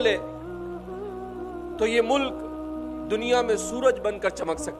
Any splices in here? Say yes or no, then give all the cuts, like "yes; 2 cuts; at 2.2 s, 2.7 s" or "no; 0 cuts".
no; 0 cuts